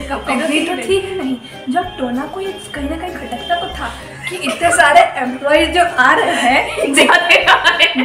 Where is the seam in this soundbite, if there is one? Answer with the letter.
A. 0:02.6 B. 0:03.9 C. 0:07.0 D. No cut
D